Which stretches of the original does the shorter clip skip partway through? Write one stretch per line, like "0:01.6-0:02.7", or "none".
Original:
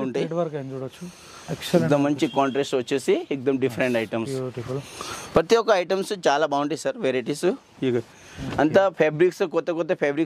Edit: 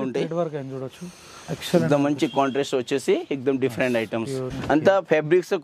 0:04.5-0:08.4